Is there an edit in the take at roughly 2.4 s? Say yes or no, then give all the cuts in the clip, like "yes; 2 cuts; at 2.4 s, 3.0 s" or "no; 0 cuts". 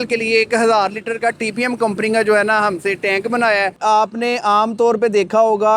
no; 1 cut; at 3.8 s